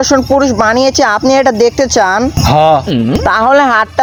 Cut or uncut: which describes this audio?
uncut